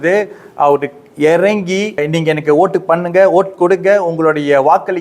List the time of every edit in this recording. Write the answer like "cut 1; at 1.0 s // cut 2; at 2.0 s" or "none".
cut 1; at 2.0 s